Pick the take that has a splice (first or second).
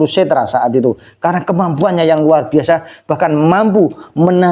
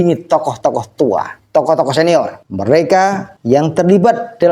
second